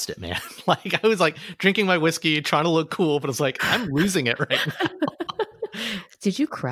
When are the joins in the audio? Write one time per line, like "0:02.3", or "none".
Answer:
none